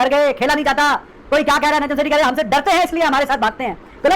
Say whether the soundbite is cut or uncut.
uncut